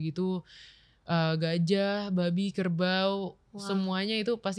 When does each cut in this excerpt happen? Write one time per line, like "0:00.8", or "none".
none